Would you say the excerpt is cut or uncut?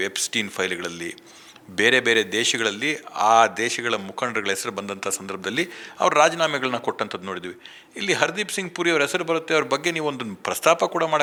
uncut